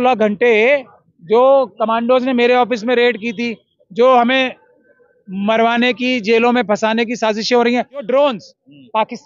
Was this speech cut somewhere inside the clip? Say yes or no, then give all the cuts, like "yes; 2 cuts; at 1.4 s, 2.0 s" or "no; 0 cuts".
yes; 1 cut; at 8.1 s